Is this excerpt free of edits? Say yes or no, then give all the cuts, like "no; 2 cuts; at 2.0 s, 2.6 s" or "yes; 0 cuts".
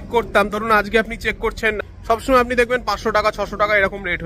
no; 1 cut; at 1.8 s